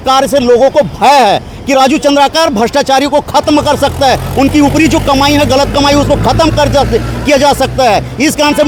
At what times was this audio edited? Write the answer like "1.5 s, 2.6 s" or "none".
none